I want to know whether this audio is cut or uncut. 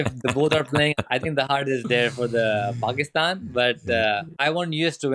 cut